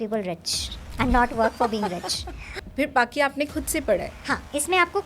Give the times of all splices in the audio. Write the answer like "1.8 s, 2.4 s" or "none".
2.5 s, 4.1 s